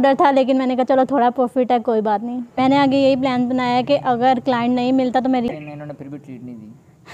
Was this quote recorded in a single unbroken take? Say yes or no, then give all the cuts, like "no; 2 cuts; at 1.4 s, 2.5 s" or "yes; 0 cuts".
no; 2 cuts; at 2.6 s, 5.5 s